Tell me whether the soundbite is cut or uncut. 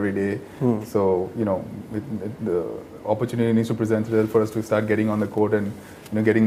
uncut